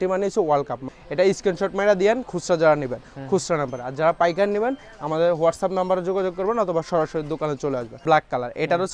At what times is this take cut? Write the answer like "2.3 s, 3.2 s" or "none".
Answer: 0.9 s, 8.0 s